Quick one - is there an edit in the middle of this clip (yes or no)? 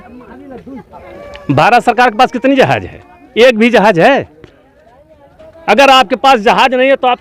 no